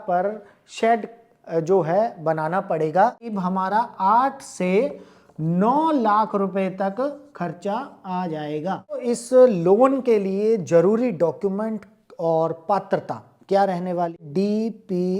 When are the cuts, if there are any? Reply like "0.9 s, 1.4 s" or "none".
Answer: 3.3 s, 8.9 s, 14.2 s